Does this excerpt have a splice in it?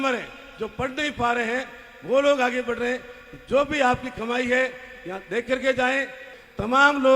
yes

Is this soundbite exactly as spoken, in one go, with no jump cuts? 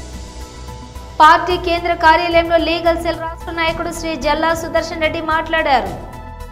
no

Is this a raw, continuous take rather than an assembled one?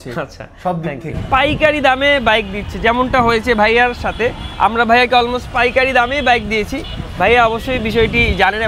no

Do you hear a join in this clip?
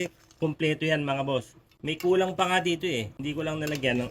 yes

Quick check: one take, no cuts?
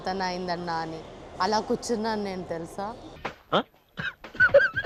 yes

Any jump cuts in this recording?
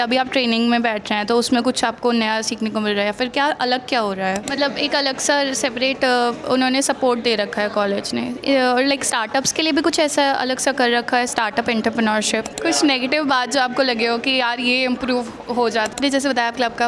yes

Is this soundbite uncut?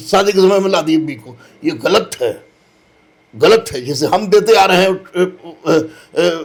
yes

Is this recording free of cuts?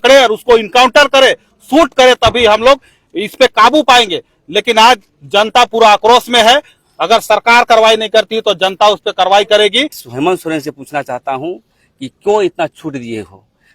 no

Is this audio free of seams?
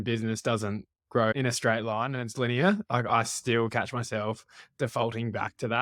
yes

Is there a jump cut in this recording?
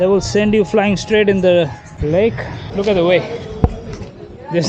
yes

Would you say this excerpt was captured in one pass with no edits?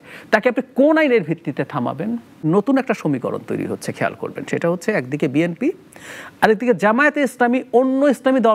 no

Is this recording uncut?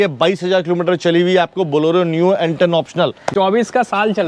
no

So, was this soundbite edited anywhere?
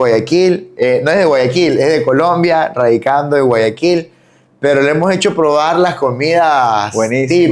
no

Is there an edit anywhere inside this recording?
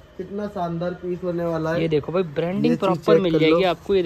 no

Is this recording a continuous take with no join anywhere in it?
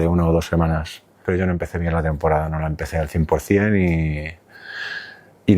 no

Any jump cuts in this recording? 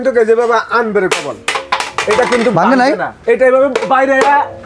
yes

